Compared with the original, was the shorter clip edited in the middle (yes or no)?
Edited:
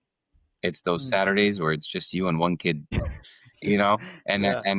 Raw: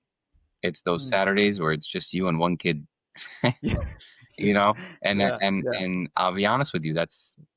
yes